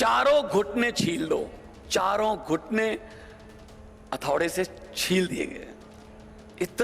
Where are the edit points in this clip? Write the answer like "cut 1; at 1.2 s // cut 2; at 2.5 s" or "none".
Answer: cut 1; at 5.7 s

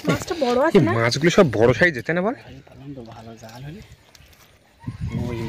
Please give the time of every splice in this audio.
none

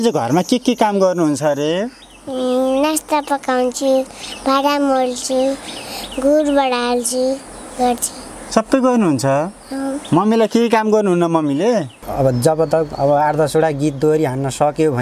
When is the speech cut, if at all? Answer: cut 1; at 12.0 s

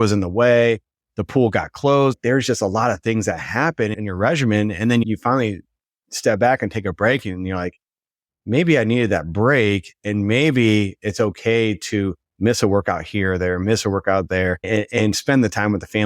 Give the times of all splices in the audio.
cut 1; at 2.1 s // cut 2; at 3.9 s // cut 3; at 5.0 s // cut 4; at 14.7 s

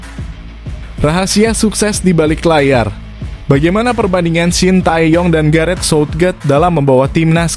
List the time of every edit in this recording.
cut 1; at 1.0 s

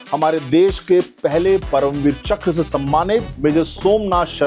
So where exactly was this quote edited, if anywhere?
cut 1; at 3.3 s

